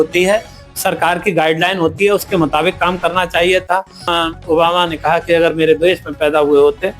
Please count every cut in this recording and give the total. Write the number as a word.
one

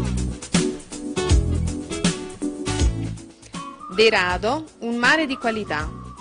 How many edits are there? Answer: one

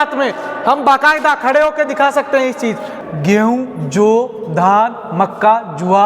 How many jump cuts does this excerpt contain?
one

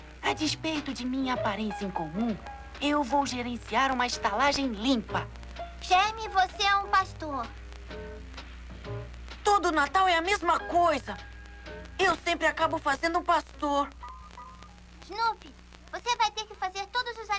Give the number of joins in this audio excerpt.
one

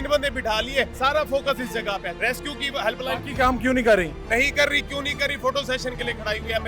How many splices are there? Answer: two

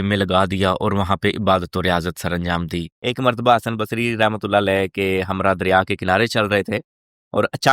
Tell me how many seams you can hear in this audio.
one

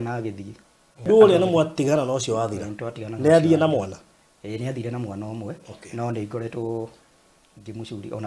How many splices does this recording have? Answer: one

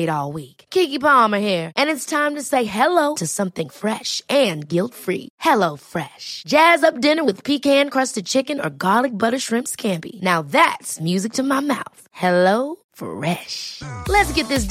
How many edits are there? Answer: zero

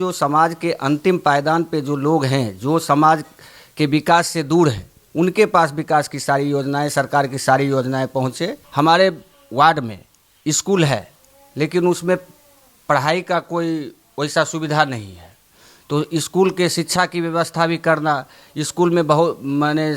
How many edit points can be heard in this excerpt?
one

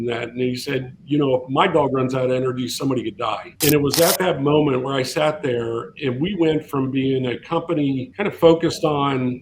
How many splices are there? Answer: two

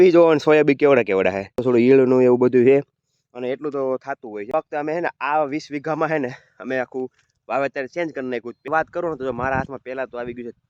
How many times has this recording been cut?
three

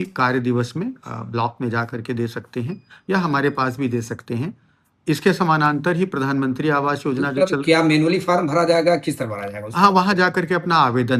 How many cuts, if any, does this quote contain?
zero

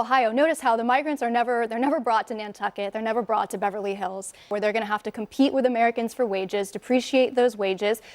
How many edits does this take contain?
one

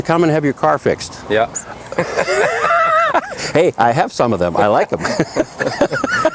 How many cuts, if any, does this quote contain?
one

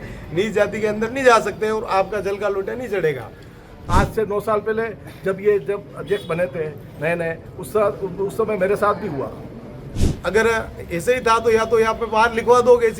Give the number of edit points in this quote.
two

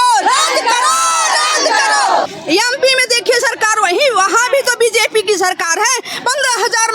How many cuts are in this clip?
one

